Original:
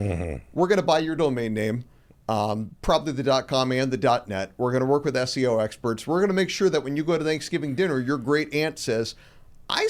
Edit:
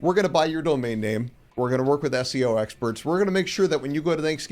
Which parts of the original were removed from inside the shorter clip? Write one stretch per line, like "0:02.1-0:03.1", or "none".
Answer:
0:02.0-0:04.4